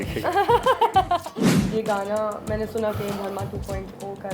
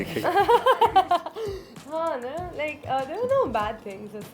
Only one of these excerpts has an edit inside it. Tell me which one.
first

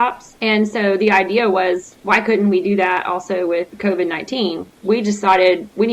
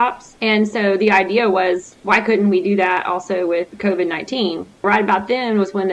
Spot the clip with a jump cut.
first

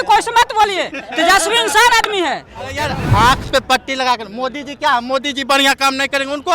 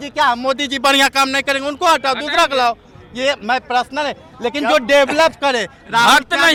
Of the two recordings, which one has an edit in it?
first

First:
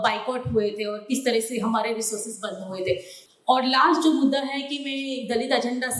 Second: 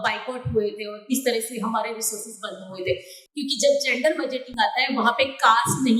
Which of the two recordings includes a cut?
second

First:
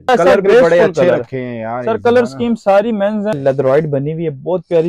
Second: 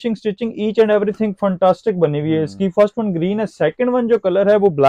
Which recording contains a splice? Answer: first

